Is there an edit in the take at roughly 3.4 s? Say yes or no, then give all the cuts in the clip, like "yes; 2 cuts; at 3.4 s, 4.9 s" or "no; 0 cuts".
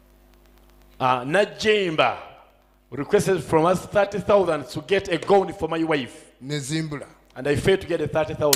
no; 0 cuts